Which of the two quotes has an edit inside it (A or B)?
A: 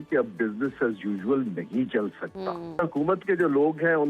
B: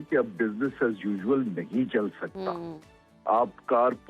A